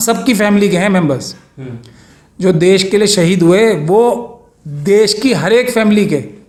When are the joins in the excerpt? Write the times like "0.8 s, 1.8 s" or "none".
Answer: none